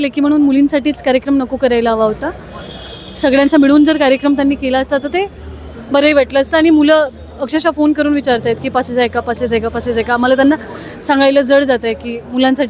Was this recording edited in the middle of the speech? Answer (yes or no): no